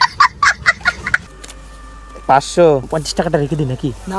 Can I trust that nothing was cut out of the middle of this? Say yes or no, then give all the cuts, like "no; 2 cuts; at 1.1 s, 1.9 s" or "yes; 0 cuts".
no; 2 cuts; at 1.2 s, 2.9 s